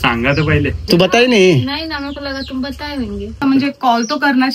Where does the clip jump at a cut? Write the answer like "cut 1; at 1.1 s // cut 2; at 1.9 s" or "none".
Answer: cut 1; at 0.9 s // cut 2; at 3.4 s